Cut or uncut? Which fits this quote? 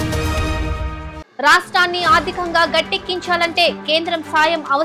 cut